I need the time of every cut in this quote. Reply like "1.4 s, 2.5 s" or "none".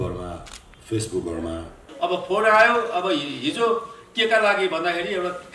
1.8 s

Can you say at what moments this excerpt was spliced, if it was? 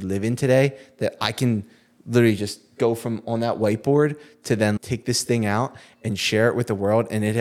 4.8 s

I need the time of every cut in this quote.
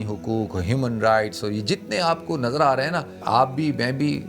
3.1 s

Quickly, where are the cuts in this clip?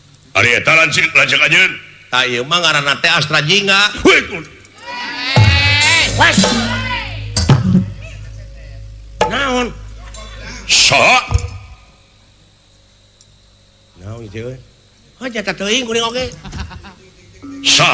none

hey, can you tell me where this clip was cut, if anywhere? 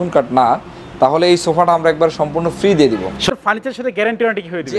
3.2 s

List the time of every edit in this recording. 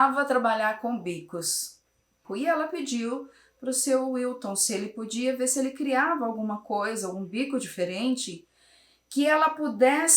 2.2 s

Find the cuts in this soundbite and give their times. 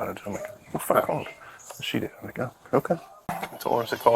3.1 s

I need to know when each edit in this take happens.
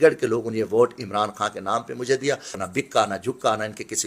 2.6 s

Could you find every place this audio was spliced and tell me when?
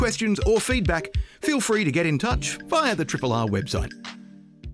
3.8 s

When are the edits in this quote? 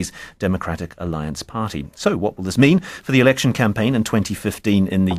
1.6 s

